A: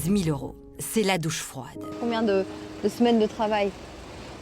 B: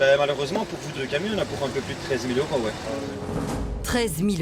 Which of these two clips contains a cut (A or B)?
A